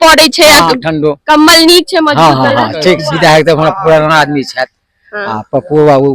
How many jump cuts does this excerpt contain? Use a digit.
1